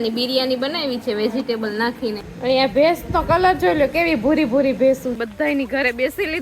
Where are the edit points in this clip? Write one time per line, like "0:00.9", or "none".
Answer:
0:02.2
0:05.2